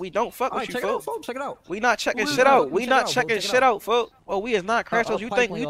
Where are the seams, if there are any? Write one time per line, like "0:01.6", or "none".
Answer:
0:04.2